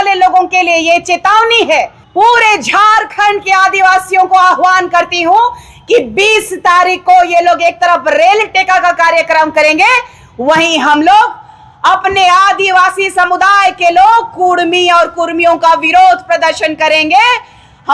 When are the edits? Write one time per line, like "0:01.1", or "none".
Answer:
0:02.0